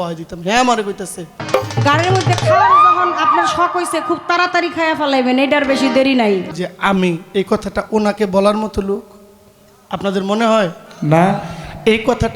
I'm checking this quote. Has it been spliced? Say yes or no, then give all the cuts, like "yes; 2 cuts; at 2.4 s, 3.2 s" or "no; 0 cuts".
yes; 2 cuts; at 1.4 s, 6.5 s